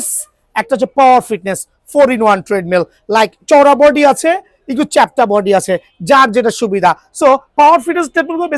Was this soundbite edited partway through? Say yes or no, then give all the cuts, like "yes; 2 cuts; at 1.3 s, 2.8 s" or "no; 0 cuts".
no; 0 cuts